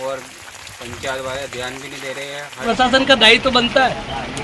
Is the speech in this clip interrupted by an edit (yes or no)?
yes